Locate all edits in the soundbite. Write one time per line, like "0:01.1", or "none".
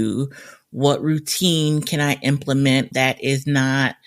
0:02.9